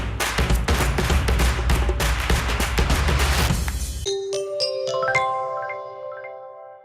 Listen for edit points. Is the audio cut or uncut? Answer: cut